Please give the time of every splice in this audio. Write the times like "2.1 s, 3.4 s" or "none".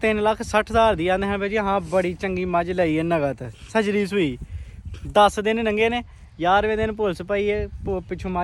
none